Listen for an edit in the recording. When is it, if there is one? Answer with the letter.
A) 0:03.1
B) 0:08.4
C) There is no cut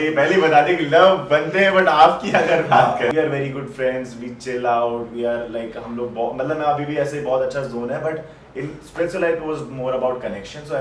A